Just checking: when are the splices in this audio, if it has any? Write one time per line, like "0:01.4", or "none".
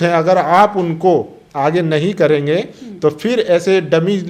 none